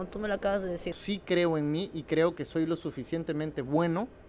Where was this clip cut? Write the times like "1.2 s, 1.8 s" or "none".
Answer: 0.9 s